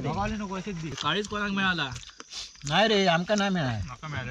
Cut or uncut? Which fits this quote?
cut